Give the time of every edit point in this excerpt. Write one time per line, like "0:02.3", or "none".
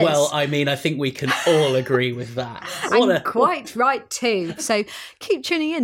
0:04.6